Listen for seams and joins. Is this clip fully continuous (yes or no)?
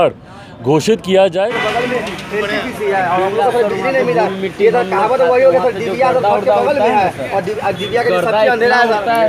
no